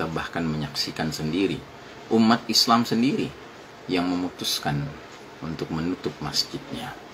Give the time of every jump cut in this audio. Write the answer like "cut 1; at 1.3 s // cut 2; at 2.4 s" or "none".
none